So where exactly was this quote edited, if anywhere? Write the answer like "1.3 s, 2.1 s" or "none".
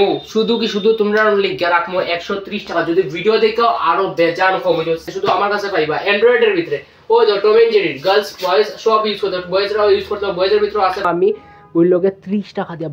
5.1 s, 11.1 s